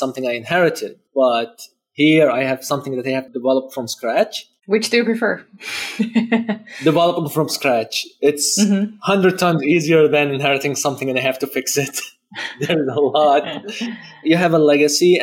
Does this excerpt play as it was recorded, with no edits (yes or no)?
no